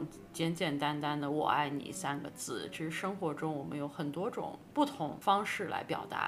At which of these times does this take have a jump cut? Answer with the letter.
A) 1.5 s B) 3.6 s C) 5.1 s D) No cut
C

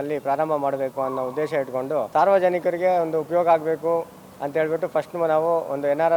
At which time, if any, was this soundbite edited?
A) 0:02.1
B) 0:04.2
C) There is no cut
A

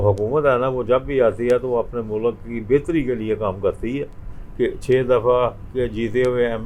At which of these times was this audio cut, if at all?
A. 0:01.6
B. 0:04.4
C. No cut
B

